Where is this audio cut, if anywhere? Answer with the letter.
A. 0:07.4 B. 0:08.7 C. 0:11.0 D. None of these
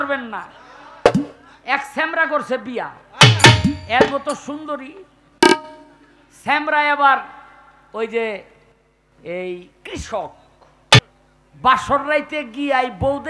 C